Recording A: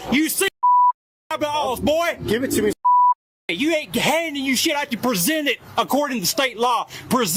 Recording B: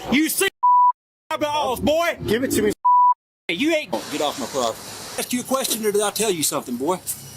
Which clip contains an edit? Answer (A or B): B